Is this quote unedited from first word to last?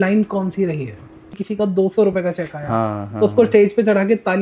no; 1 cut; at 1.3 s

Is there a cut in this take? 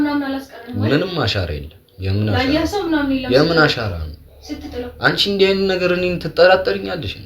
no; 0 cuts

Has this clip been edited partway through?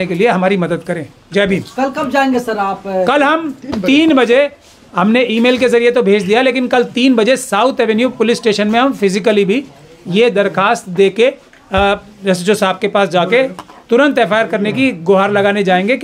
no; 0 cuts

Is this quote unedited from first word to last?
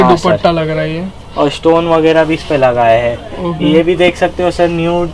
yes; 0 cuts

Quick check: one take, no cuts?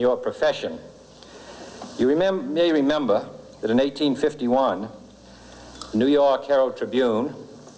yes; 0 cuts

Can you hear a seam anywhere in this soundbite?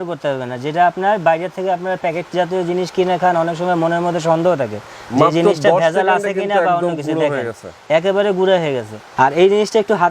yes; 1 cut; at 9.0 s

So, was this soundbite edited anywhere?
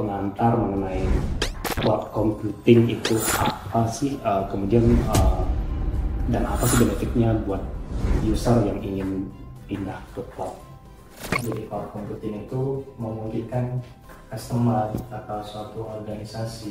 yes; 1 cut; at 11.4 s

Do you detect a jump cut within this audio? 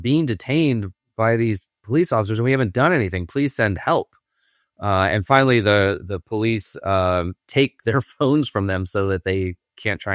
no; 0 cuts

